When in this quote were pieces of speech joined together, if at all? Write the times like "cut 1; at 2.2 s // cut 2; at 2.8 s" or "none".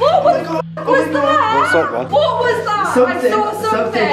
cut 1; at 2.1 s